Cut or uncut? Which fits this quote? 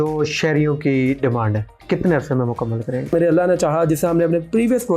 cut